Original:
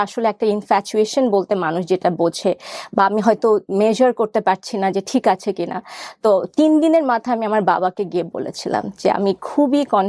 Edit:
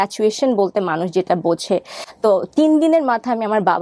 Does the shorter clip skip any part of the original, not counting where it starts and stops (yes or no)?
yes